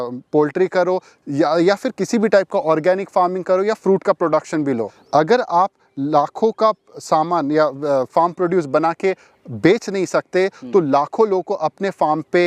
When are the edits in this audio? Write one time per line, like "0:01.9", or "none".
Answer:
0:04.9